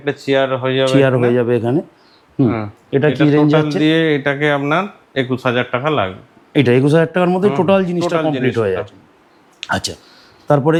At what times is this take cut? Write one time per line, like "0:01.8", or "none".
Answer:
none